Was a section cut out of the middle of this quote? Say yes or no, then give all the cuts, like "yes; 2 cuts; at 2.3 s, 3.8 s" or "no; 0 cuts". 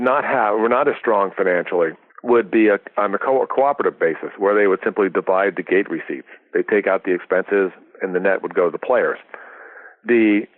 yes; 1 cut; at 2.1 s